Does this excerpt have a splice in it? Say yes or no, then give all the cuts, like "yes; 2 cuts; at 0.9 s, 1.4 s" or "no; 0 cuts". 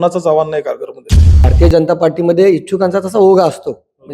yes; 1 cut; at 1.4 s